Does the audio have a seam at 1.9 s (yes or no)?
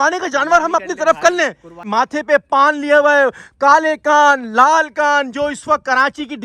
yes